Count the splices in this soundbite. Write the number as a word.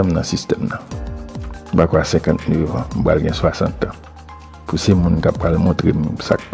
zero